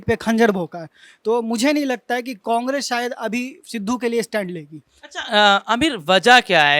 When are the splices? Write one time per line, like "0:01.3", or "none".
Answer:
none